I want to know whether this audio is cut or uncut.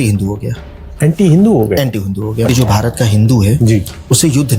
cut